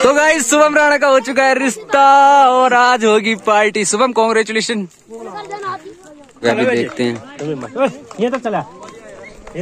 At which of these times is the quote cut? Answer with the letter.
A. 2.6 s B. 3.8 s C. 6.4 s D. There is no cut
C